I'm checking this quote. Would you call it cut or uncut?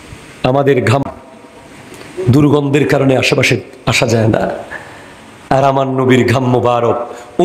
cut